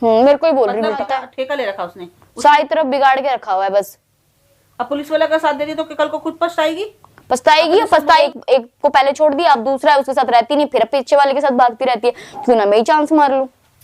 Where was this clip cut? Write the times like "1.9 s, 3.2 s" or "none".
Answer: 1.0 s, 8.2 s